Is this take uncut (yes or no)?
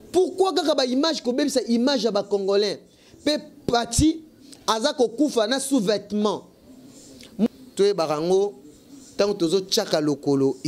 no